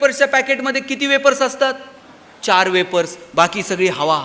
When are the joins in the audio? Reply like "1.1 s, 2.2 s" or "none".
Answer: none